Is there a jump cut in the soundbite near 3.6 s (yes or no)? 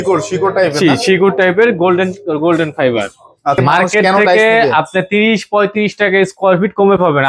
yes